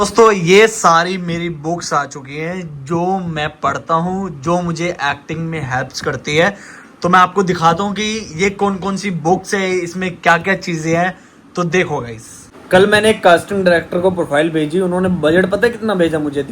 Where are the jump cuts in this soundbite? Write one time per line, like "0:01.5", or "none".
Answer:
0:12.6